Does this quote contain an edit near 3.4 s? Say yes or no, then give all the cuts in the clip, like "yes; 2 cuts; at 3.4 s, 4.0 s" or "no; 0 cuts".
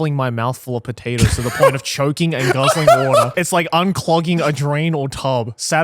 yes; 1 cut; at 3.4 s